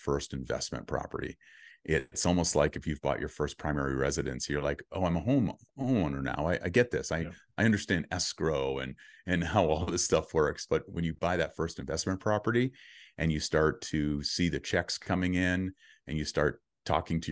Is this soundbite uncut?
yes; 0 cuts

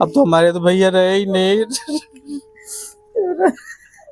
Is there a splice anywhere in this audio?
no; 0 cuts

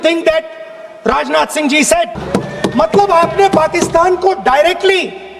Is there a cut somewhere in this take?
yes; 1 cut; at 2.1 s

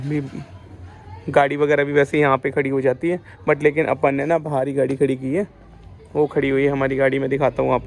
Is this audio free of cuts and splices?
yes; 0 cuts

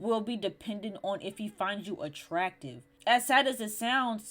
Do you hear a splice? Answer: yes; 1 cut; at 2.9 s

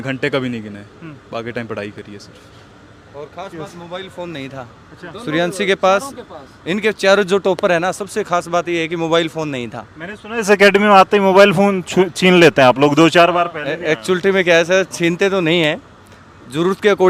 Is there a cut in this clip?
no; 0 cuts

